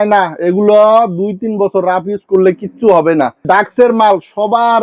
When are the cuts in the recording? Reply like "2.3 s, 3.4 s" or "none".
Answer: 3.4 s